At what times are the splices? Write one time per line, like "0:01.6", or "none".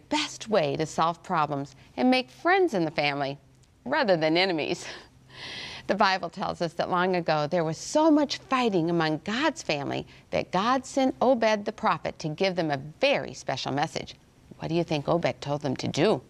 none